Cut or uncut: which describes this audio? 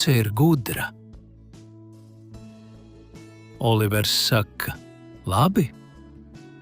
cut